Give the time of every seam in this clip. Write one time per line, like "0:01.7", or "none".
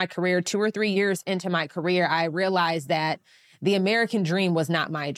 0:00.9